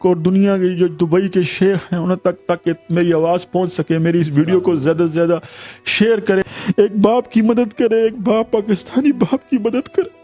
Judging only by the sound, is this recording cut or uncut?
cut